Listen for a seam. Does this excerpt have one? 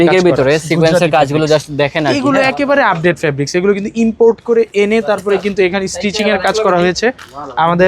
no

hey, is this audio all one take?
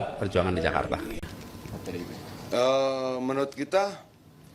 no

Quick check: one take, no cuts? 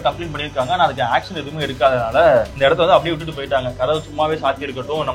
no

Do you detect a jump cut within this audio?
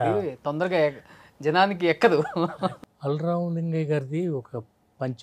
yes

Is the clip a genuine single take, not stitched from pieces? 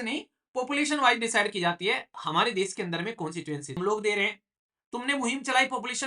no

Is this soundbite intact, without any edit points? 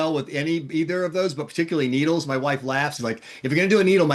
no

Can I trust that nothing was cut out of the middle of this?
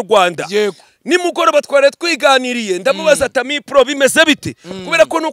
yes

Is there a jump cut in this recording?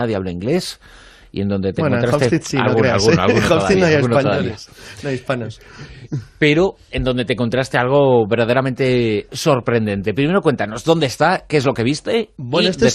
no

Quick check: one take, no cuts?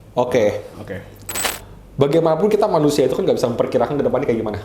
no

